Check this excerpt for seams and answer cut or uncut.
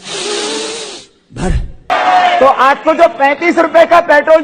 cut